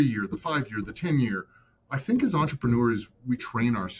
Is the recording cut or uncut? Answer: uncut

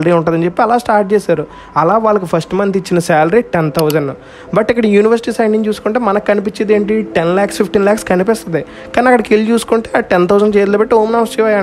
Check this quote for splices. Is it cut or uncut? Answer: uncut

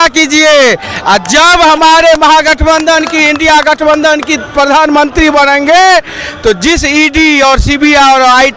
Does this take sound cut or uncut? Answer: uncut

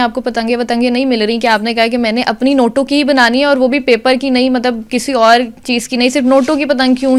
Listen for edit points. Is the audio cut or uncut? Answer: uncut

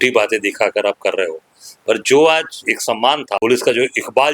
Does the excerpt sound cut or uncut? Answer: cut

